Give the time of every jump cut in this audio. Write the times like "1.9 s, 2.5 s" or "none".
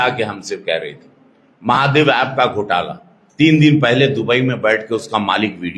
none